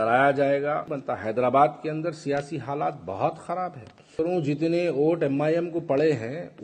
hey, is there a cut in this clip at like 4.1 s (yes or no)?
yes